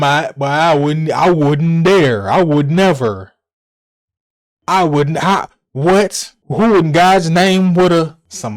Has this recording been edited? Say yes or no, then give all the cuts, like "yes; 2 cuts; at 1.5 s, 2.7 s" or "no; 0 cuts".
no; 0 cuts